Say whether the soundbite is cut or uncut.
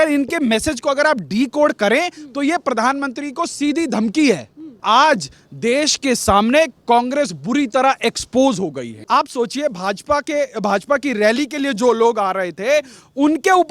cut